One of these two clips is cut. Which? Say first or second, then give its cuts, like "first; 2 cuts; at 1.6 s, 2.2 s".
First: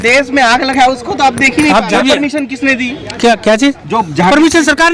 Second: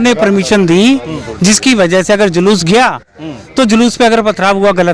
first; 1 cut; at 1.9 s